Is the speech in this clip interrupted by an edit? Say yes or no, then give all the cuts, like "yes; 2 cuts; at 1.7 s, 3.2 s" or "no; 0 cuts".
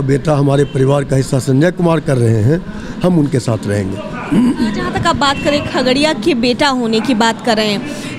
no; 0 cuts